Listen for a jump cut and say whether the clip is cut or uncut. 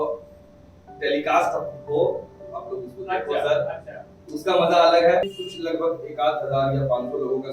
cut